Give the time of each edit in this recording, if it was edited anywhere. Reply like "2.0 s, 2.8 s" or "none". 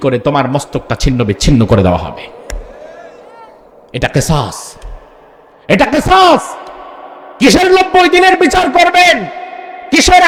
none